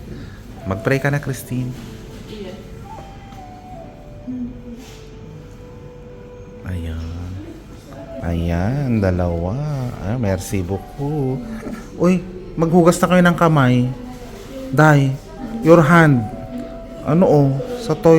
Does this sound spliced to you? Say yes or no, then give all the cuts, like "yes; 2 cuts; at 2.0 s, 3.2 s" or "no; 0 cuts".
yes; 1 cut; at 8.2 s